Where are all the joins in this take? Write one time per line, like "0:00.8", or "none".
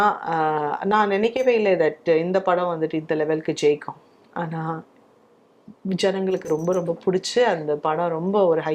none